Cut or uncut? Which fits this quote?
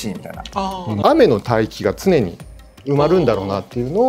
cut